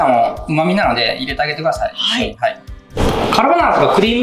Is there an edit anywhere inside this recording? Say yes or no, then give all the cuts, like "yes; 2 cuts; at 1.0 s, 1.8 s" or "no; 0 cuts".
yes; 1 cut; at 3.0 s